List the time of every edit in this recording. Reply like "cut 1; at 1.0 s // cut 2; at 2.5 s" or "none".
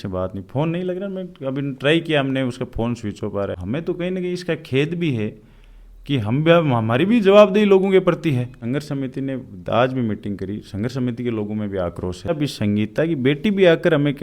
cut 1; at 3.6 s // cut 2; at 8.6 s // cut 3; at 12.3 s